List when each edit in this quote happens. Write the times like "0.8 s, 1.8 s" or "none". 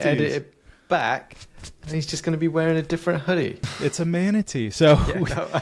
3.6 s